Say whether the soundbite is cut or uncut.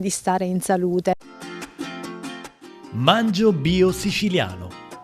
cut